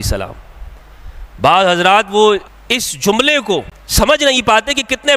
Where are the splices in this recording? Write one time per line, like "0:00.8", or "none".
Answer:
0:02.5
0:03.8